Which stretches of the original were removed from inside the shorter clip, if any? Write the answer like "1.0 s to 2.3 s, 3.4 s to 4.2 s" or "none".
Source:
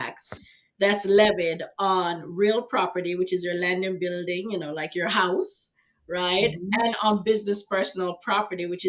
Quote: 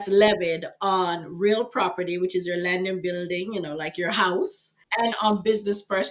5.9 s to 6.7 s